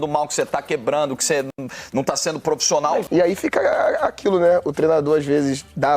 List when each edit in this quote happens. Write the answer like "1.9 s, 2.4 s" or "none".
3.0 s